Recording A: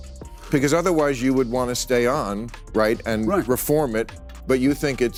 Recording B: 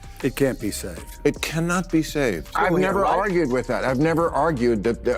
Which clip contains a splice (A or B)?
B